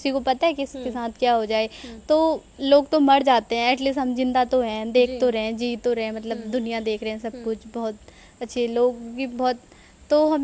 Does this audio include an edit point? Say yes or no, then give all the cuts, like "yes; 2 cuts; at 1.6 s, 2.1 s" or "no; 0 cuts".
no; 0 cuts